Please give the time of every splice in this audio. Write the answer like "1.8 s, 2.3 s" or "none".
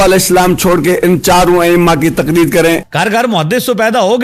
2.8 s

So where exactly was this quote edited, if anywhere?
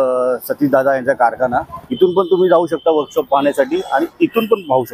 1.8 s

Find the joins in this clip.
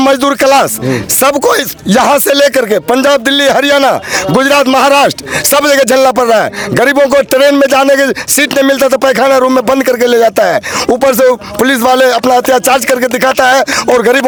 none

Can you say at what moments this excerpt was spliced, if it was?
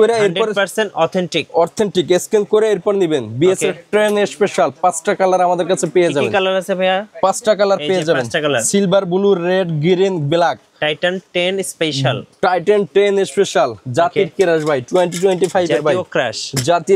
none

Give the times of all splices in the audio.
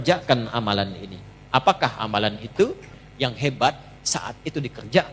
3.0 s

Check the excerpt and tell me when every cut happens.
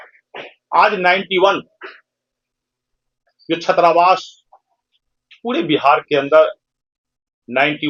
none

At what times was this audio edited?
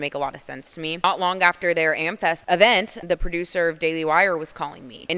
0.9 s, 2.4 s, 2.9 s

